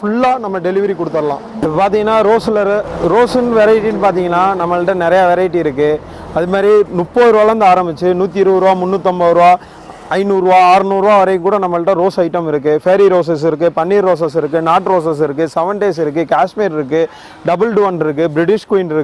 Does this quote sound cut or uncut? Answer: uncut